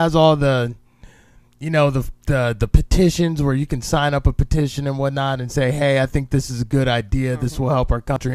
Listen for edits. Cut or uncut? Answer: uncut